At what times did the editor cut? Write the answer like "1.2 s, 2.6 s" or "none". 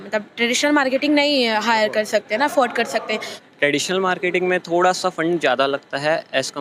3.3 s